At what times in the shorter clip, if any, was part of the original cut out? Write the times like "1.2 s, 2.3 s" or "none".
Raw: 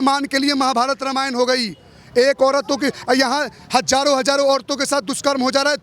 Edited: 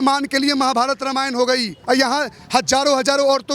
1.8 s